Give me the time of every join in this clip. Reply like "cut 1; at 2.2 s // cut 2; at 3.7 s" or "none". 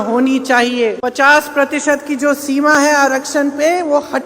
cut 1; at 1.0 s